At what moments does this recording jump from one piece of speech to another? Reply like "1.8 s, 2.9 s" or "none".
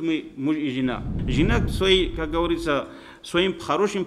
1.1 s